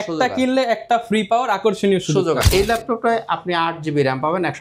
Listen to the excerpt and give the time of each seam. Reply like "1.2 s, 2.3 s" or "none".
2.4 s